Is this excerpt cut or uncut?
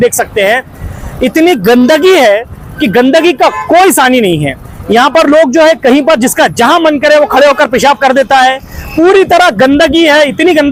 uncut